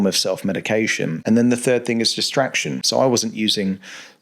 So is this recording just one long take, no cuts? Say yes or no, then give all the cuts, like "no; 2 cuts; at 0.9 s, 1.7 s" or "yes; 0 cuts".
no; 2 cuts; at 1.2 s, 2.9 s